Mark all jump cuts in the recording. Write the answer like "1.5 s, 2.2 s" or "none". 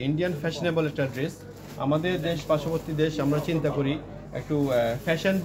none